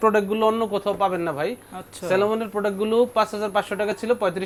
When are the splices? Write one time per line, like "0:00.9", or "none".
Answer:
none